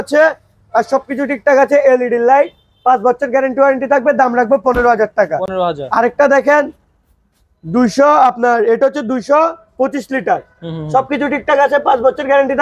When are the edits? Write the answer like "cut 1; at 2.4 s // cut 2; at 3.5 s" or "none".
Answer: none